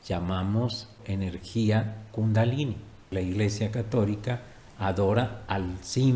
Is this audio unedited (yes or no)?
no